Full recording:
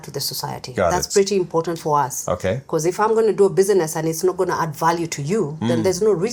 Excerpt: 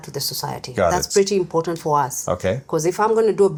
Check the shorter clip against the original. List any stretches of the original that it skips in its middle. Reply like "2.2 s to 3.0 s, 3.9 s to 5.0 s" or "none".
none